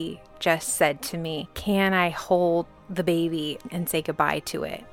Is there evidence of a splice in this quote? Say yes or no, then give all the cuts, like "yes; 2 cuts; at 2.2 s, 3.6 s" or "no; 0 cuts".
yes; 3 cuts; at 1.5 s, 2.8 s, 3.6 s